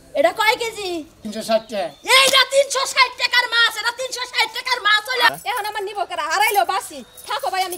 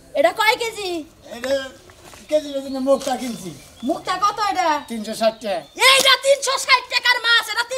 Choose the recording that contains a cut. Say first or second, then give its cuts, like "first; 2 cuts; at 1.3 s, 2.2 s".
first; 2 cuts; at 1.2 s, 5.3 s